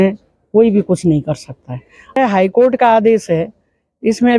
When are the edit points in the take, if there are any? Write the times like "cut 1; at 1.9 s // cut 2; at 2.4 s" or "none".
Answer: cut 1; at 2.2 s